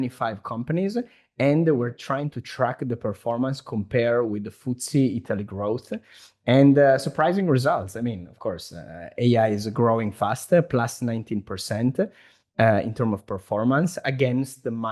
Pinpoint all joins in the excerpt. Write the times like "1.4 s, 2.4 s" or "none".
none